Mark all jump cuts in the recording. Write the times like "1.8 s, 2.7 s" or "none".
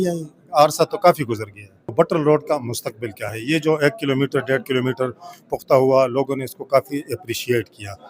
1.9 s